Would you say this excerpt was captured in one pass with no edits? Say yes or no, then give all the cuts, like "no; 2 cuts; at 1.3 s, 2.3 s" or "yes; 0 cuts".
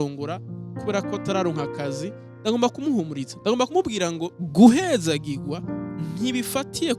no; 1 cut; at 4.3 s